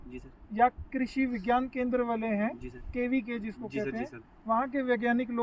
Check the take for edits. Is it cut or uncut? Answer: uncut